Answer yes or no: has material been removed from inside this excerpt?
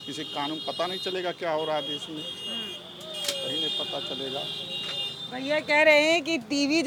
no